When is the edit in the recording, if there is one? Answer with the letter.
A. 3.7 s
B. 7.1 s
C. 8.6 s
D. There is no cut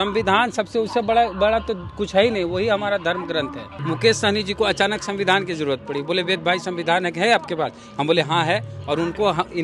A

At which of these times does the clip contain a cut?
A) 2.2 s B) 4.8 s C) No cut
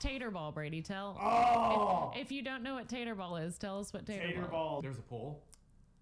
B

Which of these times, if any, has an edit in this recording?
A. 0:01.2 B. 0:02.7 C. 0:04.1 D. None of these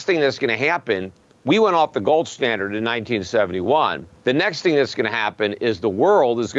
C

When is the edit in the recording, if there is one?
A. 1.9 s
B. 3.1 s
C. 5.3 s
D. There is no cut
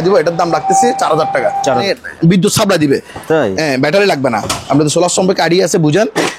A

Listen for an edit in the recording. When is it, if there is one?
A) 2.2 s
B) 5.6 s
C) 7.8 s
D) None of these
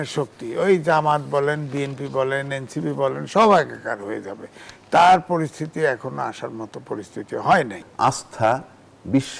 C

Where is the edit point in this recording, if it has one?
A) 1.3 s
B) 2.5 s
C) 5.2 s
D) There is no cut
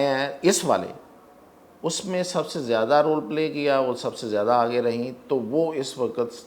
D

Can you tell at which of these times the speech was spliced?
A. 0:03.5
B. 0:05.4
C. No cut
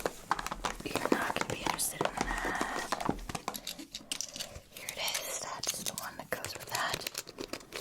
A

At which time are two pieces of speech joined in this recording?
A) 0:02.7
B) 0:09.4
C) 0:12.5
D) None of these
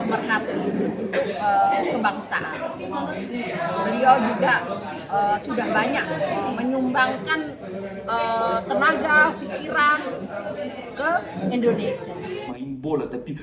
C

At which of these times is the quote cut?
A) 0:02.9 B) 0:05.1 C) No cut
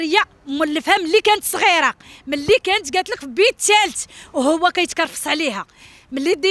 C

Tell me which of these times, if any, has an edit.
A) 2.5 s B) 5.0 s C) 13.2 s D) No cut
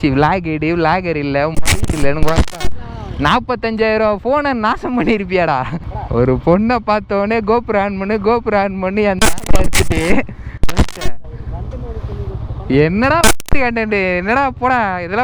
D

